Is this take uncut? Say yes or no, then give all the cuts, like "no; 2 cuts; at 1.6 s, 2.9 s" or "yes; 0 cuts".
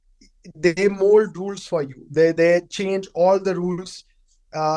yes; 0 cuts